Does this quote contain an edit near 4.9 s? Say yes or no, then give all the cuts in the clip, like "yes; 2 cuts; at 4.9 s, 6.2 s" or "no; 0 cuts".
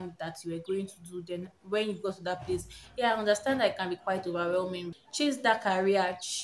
yes; 1 cut; at 4.9 s